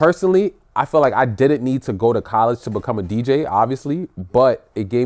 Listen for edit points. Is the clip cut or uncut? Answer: uncut